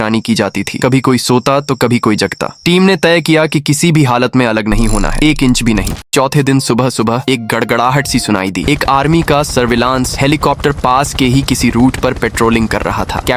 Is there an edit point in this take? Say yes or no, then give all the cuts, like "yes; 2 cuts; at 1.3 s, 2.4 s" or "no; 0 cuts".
yes; 1 cut; at 6.0 s